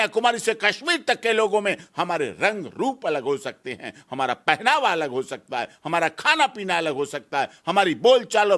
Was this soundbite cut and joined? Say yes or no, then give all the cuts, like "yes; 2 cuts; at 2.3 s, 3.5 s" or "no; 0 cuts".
no; 0 cuts